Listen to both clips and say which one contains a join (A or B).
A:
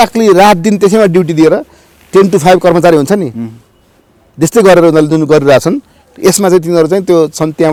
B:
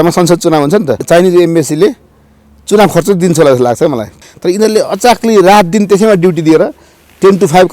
B